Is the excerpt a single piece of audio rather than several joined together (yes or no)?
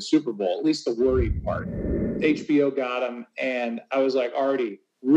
no